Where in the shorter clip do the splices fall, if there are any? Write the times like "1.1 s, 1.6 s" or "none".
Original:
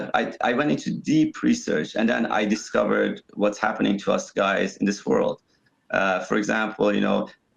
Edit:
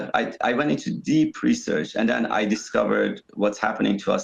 none